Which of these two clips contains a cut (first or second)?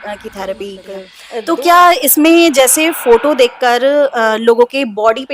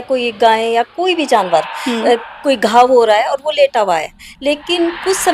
first